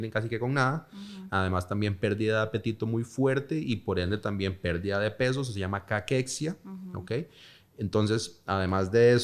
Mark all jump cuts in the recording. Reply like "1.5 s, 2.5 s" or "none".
none